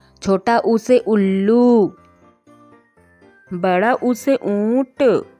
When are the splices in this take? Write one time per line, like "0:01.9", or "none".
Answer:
0:02.0
0:03.5